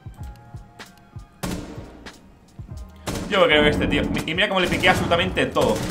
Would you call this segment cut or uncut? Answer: uncut